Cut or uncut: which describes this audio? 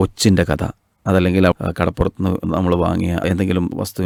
uncut